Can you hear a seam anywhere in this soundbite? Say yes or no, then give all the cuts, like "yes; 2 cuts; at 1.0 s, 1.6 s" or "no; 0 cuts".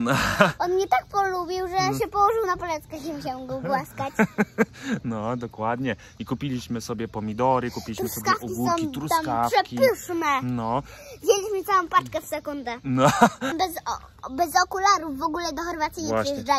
yes; 1 cut; at 13.5 s